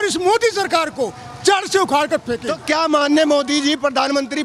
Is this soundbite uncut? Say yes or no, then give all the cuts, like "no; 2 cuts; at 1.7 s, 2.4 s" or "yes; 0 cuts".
no; 1 cut; at 2.5 s